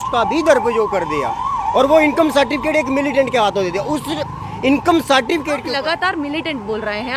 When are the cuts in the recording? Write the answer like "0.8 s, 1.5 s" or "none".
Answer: none